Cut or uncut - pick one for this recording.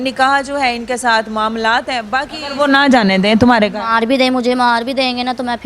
cut